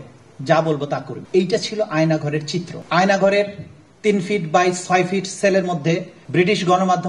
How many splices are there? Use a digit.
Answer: 3